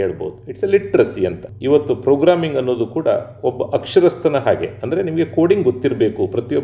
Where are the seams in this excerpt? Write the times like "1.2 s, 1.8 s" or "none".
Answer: 1.5 s